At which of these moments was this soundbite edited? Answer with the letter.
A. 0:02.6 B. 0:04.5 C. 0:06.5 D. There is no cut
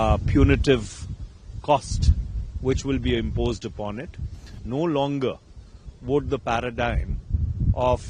B